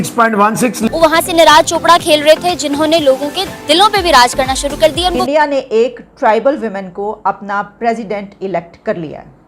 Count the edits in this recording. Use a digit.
2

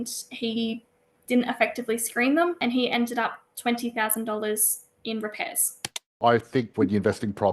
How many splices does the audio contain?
2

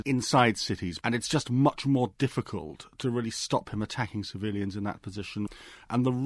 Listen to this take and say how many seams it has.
2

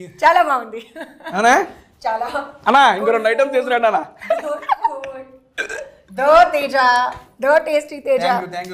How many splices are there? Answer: 0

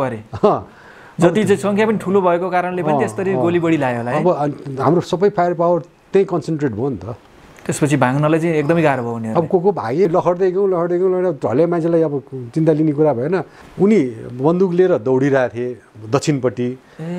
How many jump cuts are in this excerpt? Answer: 2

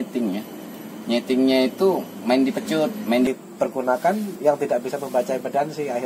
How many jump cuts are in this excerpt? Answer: 1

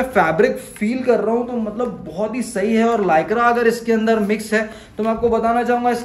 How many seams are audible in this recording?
0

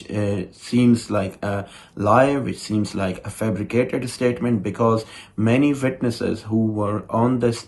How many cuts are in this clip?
0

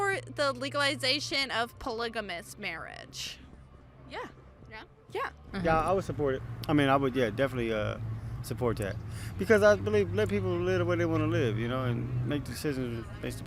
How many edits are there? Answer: 1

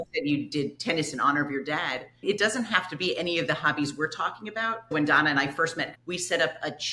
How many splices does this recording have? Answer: 2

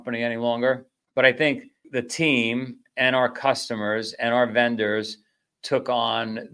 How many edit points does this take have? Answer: 2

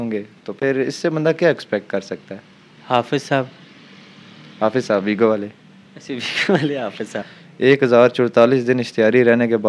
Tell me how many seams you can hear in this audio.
1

